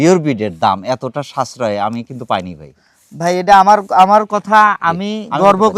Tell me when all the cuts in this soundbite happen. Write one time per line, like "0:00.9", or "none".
none